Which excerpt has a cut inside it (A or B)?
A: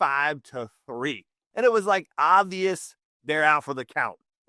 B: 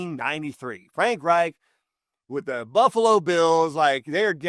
A